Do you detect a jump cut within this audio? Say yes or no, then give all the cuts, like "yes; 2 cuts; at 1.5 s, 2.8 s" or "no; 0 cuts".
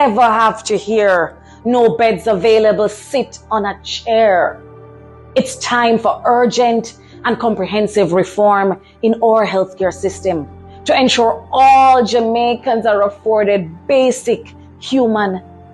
no; 0 cuts